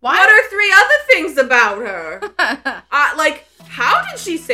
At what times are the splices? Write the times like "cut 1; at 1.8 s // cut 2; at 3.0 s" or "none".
none